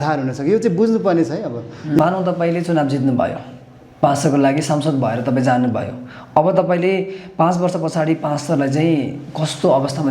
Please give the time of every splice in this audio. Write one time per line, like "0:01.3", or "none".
0:02.0